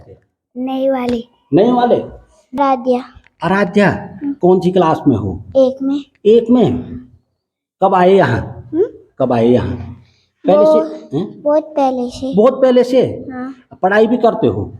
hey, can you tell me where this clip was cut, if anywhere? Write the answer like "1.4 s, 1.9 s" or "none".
2.6 s